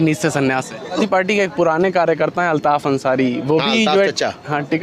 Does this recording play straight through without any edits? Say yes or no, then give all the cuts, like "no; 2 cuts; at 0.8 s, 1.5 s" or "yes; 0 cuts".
no; 1 cut; at 1.0 s